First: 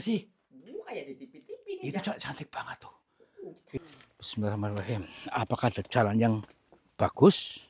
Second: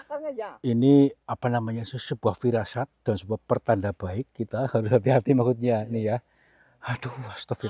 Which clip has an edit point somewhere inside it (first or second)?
first